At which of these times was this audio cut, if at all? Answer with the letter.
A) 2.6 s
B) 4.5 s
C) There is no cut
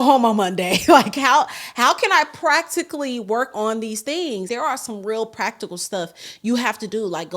B